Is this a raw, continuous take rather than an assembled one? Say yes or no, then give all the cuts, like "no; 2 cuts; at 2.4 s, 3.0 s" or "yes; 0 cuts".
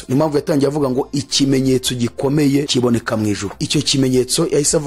no; 2 cuts; at 2.7 s, 3.5 s